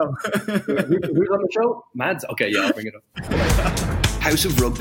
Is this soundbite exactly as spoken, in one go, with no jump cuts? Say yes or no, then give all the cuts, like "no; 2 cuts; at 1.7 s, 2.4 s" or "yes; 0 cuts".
no; 1 cut; at 3.4 s